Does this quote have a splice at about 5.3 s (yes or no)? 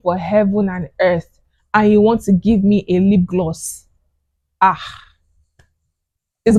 no